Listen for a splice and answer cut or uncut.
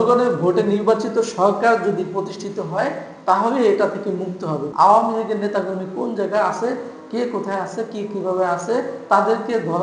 cut